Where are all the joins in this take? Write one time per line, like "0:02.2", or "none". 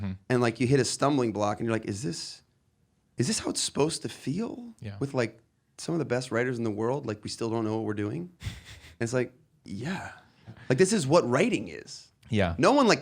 0:10.5